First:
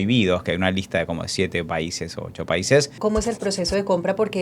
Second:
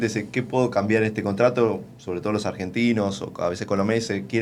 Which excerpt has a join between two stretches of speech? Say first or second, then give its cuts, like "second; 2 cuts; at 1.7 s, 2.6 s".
first; 1 cut; at 3.0 s